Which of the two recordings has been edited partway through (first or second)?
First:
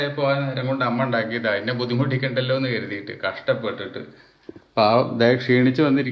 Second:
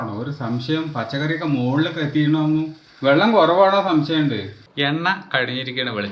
second